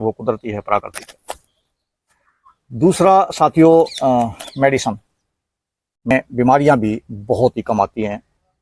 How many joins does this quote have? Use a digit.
1